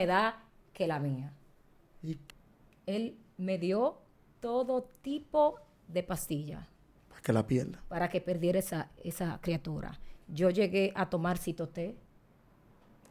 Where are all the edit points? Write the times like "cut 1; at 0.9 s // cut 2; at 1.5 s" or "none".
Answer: cut 1; at 2.1 s